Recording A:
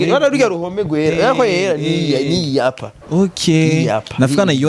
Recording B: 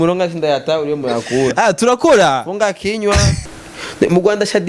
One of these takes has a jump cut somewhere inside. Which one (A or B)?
B